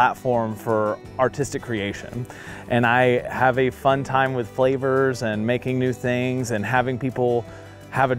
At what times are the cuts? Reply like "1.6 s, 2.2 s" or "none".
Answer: none